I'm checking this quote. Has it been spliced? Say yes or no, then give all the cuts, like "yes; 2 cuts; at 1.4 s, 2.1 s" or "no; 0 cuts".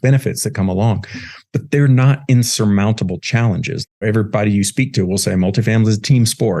yes; 1 cut; at 4.0 s